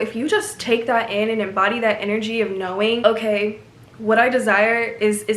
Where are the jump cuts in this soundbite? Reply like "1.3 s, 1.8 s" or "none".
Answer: 3.0 s